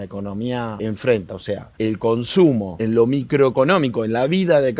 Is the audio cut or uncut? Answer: cut